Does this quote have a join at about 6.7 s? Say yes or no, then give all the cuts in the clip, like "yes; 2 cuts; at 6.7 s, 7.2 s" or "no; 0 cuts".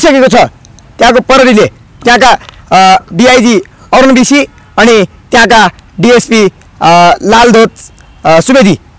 no; 0 cuts